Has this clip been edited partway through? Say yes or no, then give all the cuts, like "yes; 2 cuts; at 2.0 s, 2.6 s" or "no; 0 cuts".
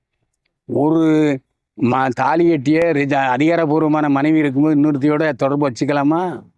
no; 0 cuts